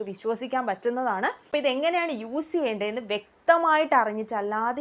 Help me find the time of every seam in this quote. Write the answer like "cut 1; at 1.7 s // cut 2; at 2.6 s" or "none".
cut 1; at 1.4 s